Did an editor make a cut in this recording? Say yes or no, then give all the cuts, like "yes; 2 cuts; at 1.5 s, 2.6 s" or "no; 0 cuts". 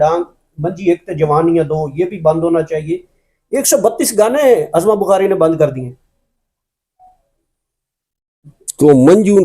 no; 0 cuts